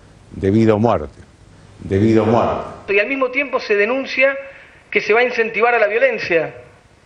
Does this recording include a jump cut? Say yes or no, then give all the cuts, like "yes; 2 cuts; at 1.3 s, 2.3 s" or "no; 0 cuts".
yes; 1 cut; at 2.9 s